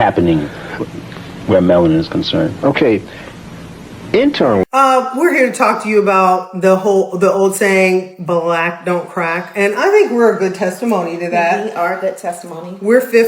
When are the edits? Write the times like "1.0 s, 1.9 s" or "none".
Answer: 4.6 s